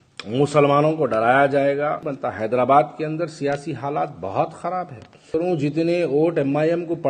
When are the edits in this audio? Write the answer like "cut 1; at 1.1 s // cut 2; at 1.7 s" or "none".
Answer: cut 1; at 2.1 s // cut 2; at 5.3 s

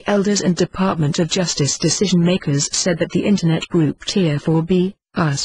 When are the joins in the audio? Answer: cut 1; at 3.1 s

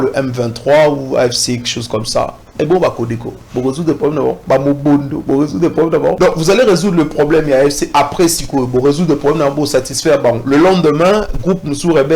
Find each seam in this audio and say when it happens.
cut 1; at 4.4 s // cut 2; at 6.2 s

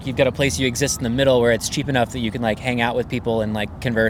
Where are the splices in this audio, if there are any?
none

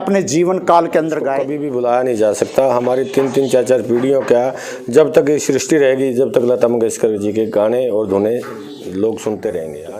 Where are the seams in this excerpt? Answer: cut 1; at 1.5 s

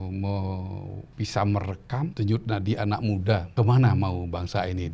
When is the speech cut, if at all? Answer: cut 1; at 1.0 s // cut 2; at 2.1 s // cut 3; at 3.5 s

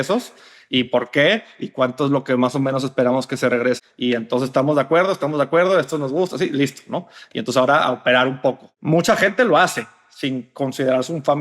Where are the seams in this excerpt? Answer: cut 1; at 3.8 s // cut 2; at 8.7 s

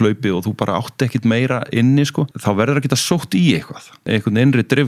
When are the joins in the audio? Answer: cut 1; at 2.3 s // cut 2; at 4.1 s

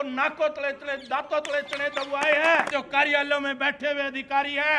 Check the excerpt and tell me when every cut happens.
cut 1; at 2.7 s

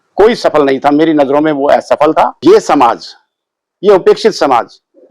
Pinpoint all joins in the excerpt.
cut 1; at 2.4 s

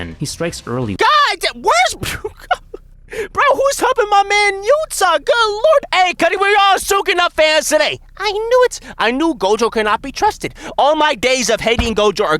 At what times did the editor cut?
cut 1; at 5.6 s

